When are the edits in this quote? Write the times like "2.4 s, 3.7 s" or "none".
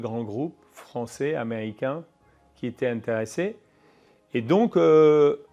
none

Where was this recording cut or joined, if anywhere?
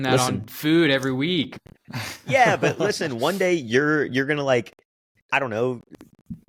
none

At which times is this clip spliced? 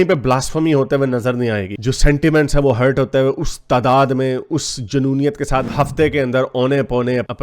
1.8 s, 5.7 s

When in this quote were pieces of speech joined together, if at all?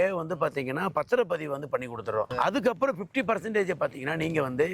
2.3 s

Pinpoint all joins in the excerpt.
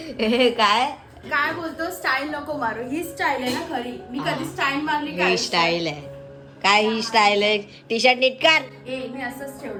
none

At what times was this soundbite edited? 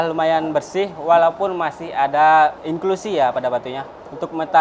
2.6 s

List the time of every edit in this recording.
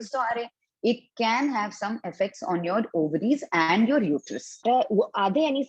4.6 s

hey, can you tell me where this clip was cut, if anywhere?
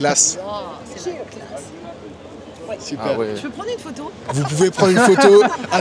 none

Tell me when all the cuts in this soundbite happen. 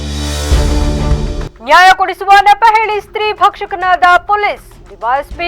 1.2 s

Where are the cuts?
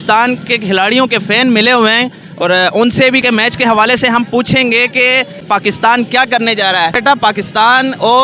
3.2 s, 5.4 s, 7.0 s

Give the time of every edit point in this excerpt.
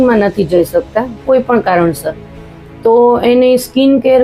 none

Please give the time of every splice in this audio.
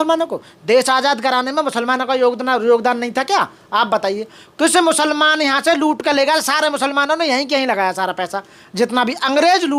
none

